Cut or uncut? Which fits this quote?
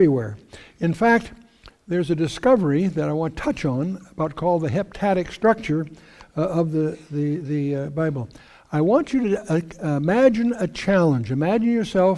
cut